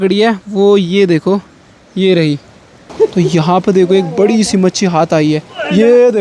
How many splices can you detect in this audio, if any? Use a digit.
1